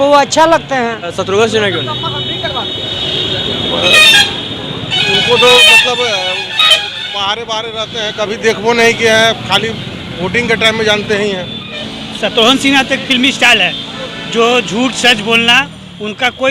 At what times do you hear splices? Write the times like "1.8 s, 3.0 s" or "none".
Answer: 1.2 s, 11.8 s